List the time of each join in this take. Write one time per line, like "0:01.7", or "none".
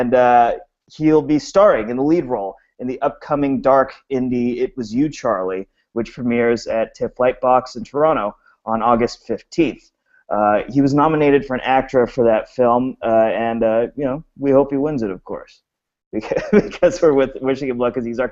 0:17.1